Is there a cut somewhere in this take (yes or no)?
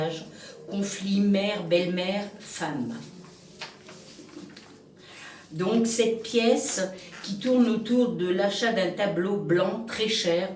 no